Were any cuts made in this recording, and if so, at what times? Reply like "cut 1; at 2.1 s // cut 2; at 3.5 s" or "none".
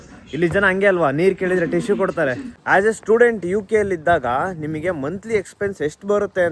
cut 1; at 2.6 s